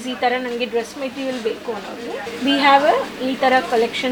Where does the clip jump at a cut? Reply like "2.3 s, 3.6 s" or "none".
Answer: none

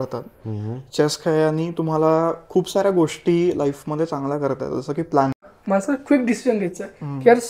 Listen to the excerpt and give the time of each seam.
5.5 s

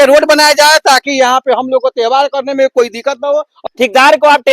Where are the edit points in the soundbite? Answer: 3.5 s

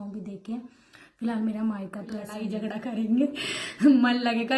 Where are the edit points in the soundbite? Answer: 2.4 s

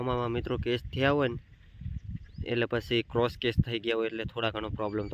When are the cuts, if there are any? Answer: none

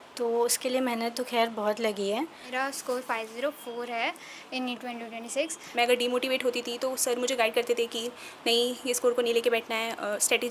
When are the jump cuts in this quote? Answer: 2.4 s, 5.6 s

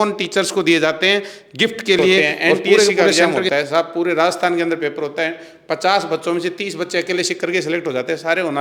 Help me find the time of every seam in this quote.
3.3 s

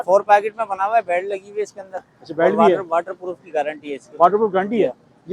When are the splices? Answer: none

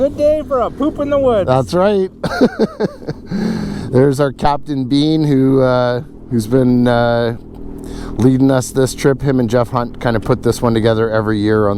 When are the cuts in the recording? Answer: none

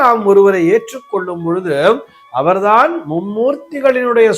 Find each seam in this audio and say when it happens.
none

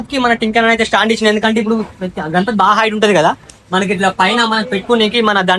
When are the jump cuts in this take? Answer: none

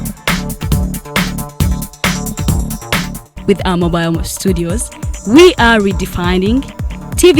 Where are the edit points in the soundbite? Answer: 2.5 s

